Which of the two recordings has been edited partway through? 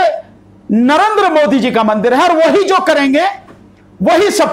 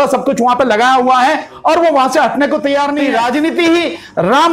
second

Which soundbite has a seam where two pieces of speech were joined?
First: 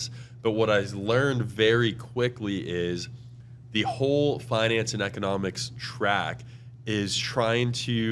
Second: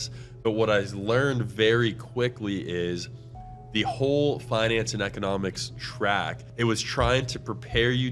second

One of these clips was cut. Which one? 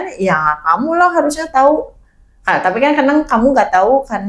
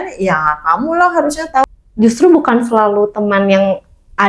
second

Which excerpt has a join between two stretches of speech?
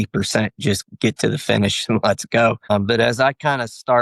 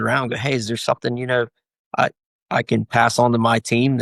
first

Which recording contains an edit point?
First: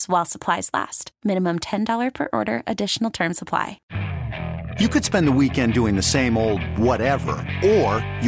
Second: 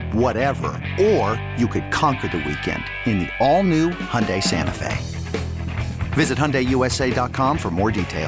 first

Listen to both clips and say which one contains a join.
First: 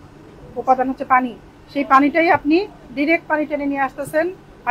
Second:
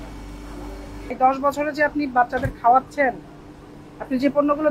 second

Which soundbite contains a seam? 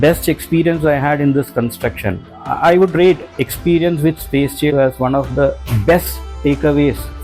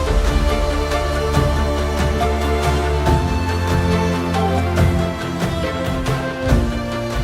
first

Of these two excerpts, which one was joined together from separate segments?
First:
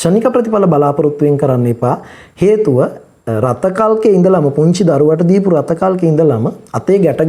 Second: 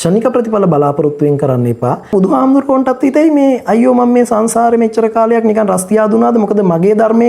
second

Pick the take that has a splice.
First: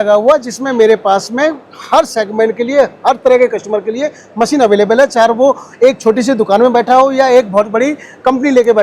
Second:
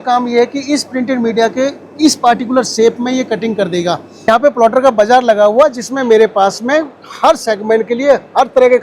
second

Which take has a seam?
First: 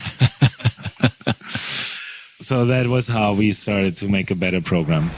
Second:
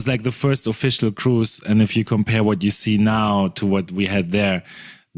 second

